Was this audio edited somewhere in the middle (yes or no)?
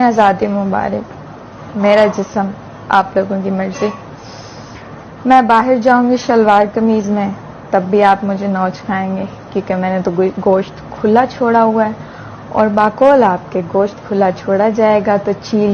no